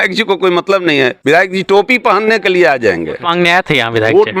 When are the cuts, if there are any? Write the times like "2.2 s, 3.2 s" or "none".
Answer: 3.2 s